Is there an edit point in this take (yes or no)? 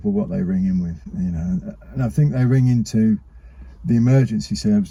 no